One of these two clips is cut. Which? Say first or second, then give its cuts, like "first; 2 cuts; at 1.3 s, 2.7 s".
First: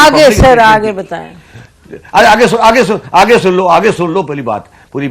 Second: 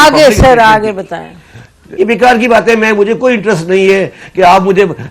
second; 1 cut; at 1.8 s